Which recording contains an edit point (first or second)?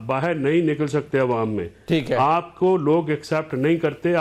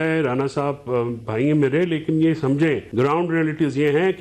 second